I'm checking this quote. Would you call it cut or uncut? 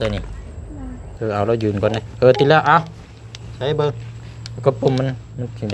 cut